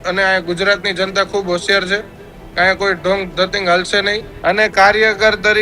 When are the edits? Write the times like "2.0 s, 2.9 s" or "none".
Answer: 4.3 s